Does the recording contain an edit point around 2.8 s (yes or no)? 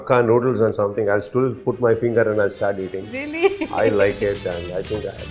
no